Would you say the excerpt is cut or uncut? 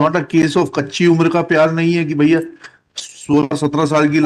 uncut